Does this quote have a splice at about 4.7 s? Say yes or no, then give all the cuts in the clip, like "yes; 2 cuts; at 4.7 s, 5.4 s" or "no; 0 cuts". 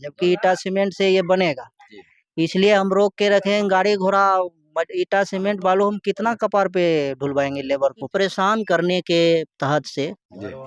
no; 1 cut; at 8.0 s